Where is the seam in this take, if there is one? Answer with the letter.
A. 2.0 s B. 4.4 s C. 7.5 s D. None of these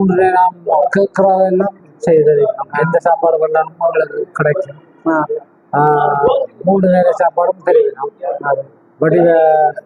D